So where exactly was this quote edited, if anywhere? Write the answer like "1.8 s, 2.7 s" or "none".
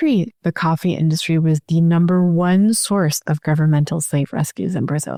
none